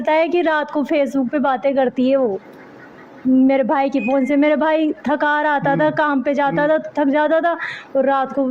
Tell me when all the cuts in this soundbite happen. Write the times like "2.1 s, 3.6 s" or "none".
none